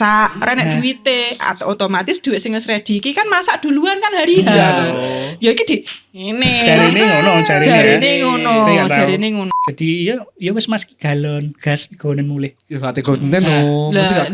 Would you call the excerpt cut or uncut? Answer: cut